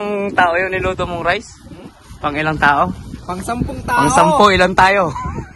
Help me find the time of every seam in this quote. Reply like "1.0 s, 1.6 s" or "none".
none